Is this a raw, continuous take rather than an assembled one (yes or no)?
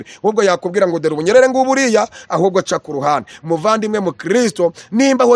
yes